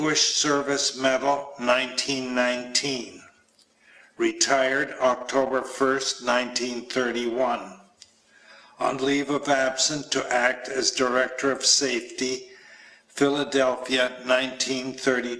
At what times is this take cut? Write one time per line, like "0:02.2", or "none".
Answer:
0:05.7